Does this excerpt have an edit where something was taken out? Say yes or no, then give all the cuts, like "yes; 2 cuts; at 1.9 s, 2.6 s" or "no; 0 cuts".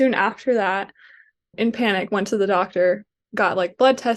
yes; 1 cut; at 1.5 s